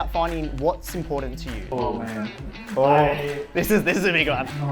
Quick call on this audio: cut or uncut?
cut